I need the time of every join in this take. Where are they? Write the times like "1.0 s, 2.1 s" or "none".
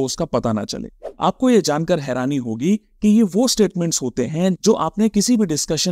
0.9 s